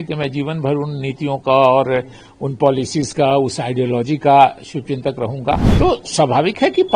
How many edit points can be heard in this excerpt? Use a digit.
1